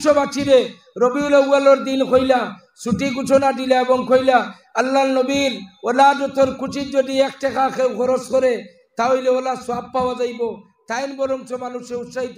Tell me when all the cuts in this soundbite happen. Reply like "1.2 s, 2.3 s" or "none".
none